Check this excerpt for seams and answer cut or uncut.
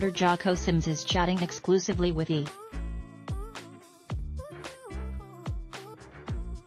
uncut